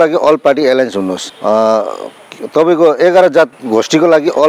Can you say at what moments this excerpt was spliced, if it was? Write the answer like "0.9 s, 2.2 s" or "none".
1.3 s